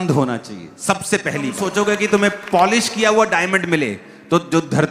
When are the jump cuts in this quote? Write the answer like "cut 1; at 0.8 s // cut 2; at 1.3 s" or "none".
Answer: cut 1; at 1.6 s